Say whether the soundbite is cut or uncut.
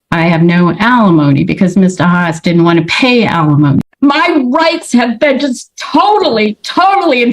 cut